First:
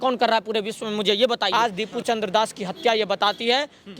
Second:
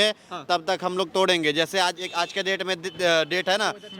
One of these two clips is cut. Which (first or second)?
first